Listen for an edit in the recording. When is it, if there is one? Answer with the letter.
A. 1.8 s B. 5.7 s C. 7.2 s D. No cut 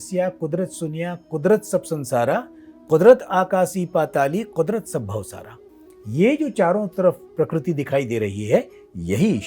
D